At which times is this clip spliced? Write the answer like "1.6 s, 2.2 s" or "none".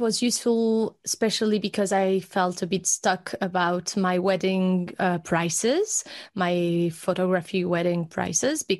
none